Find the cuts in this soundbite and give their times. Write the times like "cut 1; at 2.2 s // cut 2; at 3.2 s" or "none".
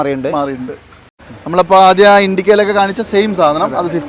cut 1; at 1.3 s